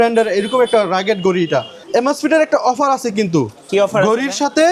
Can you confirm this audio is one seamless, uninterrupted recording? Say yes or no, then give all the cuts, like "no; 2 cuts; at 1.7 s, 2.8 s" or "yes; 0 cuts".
no; 1 cut; at 1.8 s